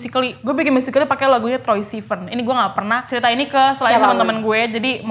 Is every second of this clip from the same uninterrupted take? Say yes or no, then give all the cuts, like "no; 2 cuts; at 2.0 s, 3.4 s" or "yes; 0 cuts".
yes; 0 cuts